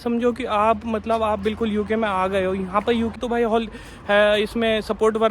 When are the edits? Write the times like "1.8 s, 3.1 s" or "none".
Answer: 3.1 s